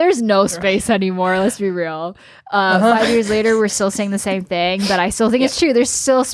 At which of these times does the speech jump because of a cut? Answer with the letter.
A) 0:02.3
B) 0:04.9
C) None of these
C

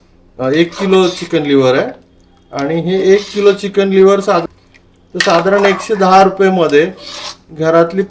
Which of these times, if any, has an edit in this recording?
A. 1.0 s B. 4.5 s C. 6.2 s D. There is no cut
B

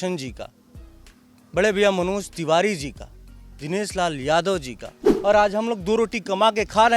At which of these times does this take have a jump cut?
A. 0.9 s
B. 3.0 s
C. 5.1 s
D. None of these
C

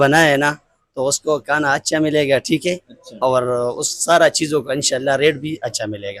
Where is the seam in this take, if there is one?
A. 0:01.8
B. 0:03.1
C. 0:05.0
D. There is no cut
D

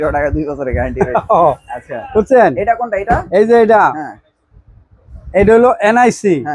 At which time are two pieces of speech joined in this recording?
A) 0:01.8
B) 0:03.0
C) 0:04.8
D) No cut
D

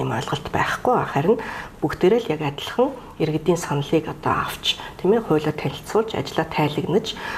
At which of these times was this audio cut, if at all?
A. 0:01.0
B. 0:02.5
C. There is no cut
C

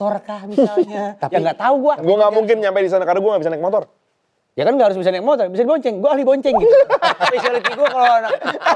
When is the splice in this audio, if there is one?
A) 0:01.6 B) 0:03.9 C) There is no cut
C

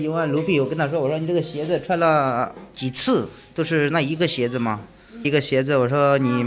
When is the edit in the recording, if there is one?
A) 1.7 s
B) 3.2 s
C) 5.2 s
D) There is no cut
C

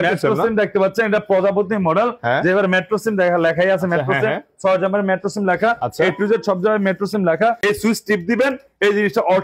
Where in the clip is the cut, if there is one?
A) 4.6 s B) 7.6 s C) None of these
B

